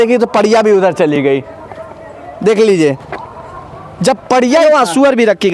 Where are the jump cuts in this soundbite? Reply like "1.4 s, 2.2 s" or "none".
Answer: 4.6 s